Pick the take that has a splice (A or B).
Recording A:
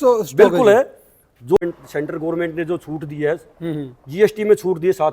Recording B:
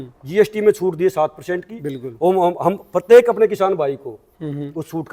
A